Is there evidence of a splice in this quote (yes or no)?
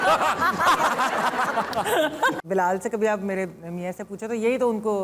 yes